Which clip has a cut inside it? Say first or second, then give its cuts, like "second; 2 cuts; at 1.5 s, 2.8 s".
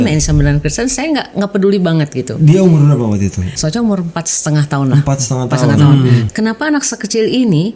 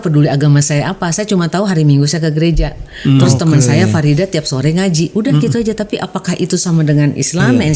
first; 2 cuts; at 3.5 s, 6.2 s